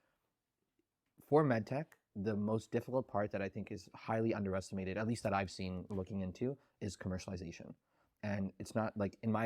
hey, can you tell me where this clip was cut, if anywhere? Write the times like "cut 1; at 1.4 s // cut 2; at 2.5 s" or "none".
none